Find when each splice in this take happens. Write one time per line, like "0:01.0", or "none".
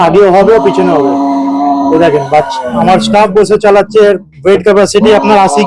none